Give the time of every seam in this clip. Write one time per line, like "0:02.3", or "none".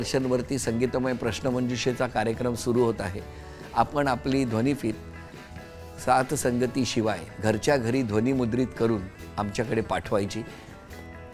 none